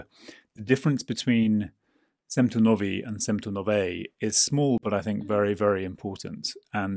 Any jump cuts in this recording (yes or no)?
no